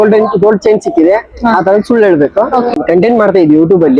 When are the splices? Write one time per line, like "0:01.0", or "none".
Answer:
0:02.7